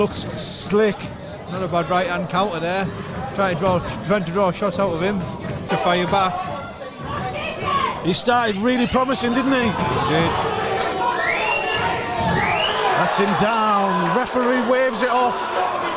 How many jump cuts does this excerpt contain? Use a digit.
1